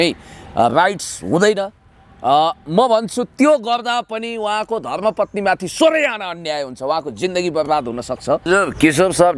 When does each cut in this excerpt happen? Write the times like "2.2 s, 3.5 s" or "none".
8.5 s